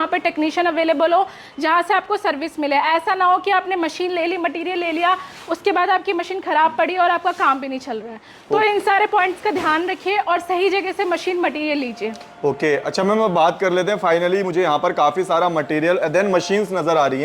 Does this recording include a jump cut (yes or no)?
no